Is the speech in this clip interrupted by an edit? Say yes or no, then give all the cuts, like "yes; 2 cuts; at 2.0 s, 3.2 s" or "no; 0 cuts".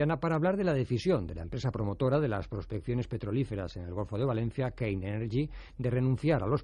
no; 0 cuts